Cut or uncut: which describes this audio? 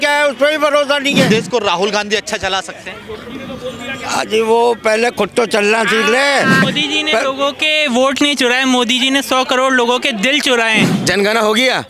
cut